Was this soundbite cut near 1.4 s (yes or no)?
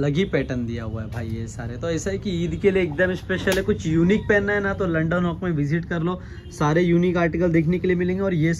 no